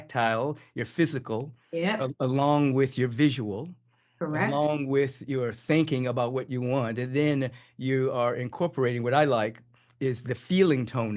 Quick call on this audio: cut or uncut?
uncut